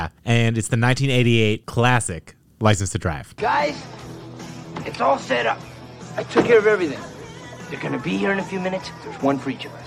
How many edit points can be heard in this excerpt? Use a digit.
0